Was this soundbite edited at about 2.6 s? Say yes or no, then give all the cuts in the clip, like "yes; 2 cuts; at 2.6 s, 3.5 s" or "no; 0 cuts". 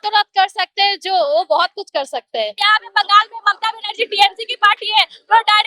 yes; 1 cut; at 2.6 s